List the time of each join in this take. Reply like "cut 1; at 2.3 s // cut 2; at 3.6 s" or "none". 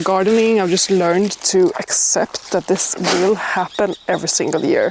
none